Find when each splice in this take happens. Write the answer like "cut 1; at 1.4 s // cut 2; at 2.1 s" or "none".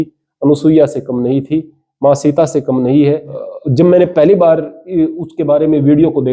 cut 1; at 3.4 s